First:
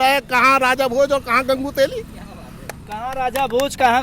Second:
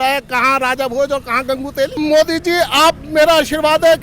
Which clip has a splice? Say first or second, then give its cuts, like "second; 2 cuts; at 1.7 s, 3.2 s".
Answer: second; 1 cut; at 2.0 s